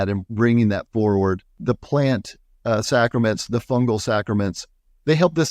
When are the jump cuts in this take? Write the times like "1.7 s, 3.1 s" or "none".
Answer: 1.6 s